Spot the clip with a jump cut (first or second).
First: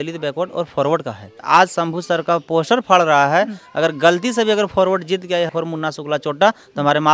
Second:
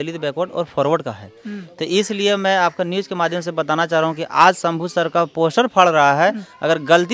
first